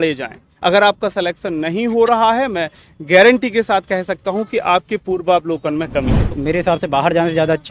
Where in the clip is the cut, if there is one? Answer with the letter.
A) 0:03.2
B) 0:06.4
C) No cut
B